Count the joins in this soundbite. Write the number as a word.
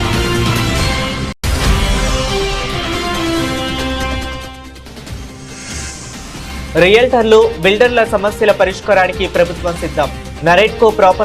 one